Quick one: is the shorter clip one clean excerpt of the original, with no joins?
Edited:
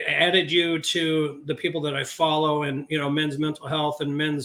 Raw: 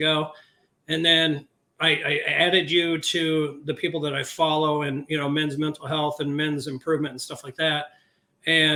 yes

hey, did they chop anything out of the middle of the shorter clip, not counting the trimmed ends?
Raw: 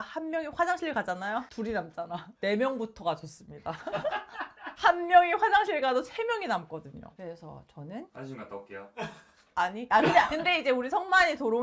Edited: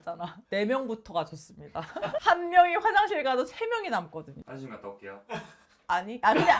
yes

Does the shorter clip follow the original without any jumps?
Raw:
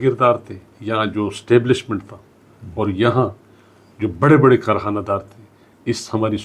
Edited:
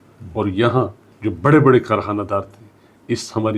no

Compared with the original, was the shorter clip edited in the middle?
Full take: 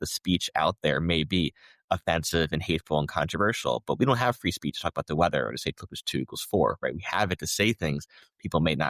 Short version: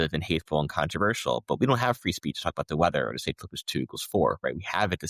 no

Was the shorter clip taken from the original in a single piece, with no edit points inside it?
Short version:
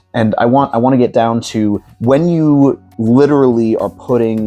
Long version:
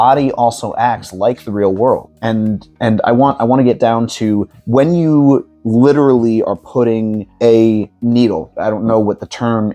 yes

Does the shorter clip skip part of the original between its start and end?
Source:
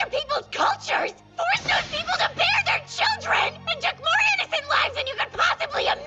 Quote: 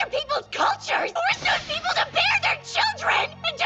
yes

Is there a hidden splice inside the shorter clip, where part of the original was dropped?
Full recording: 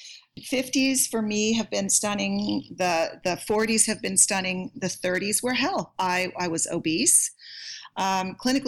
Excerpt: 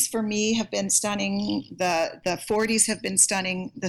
no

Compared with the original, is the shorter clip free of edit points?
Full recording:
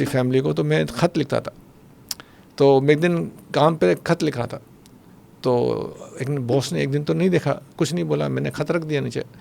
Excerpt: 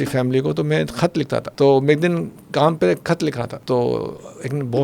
no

